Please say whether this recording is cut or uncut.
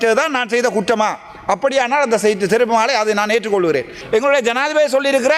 cut